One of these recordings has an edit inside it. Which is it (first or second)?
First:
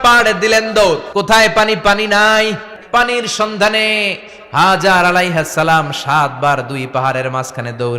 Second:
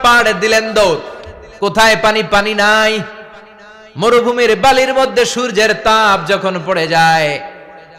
first